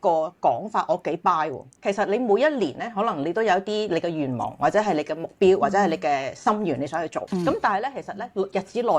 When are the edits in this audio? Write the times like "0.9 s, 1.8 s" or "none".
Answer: 1.8 s, 7.2 s